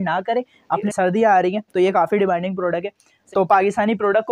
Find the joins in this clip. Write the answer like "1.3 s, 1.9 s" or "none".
0.9 s, 3.1 s